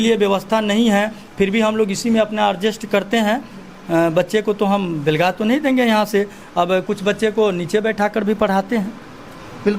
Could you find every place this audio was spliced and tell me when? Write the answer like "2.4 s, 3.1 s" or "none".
none